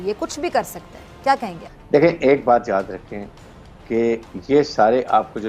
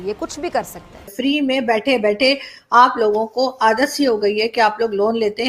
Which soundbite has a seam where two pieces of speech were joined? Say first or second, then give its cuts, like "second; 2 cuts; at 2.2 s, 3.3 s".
second; 1 cut; at 1.1 s